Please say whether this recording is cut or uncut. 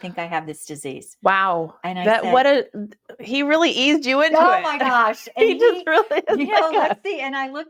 uncut